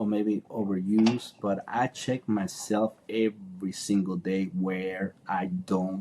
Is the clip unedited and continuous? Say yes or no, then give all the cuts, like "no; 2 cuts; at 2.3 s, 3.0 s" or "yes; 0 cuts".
yes; 0 cuts